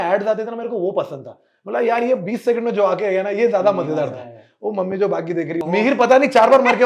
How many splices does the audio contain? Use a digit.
1